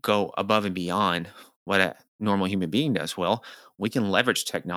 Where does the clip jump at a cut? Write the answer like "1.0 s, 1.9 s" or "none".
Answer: none